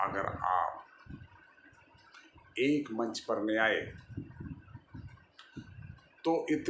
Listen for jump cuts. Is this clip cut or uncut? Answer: uncut